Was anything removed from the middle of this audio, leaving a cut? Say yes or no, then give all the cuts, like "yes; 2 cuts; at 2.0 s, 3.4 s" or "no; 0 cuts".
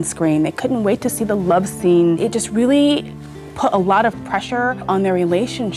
yes; 2 cuts; at 2.2 s, 4.9 s